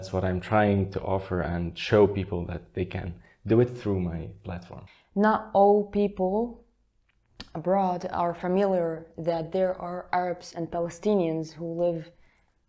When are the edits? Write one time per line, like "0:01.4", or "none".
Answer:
0:04.7